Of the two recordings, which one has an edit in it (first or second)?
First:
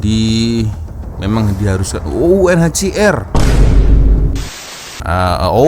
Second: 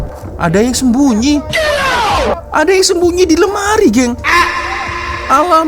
first